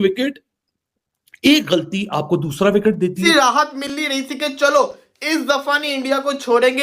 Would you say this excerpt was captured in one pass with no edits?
no; 1 cut; at 3.2 s

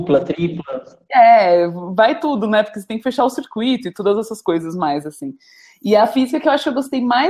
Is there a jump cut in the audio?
no; 0 cuts

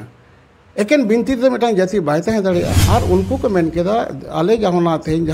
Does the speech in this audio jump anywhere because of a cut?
yes; 1 cut; at 2.8 s

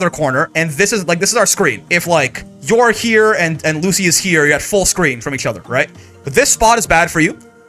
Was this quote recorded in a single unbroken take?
no; 1 cut; at 1.9 s

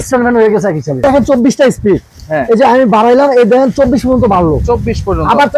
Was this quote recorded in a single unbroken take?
no; 1 cut; at 1.0 s

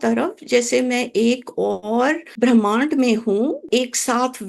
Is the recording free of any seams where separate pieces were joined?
no; 2 cuts; at 2.3 s, 3.7 s

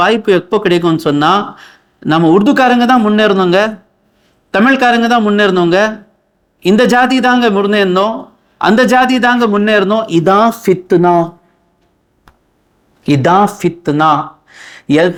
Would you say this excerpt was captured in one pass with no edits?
yes; 0 cuts

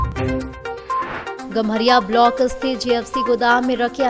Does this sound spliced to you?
no; 0 cuts

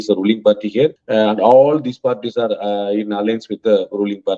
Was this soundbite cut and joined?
yes; 1 cut; at 1.0 s

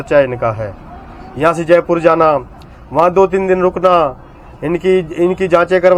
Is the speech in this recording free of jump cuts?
yes; 0 cuts

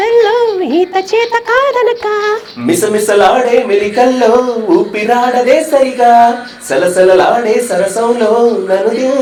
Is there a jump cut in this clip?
no; 0 cuts

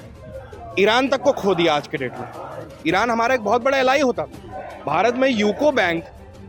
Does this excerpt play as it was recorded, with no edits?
yes; 0 cuts

